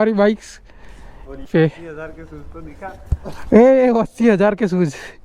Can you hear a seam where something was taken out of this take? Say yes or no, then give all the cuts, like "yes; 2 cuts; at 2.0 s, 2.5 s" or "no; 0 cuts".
yes; 1 cut; at 1.4 s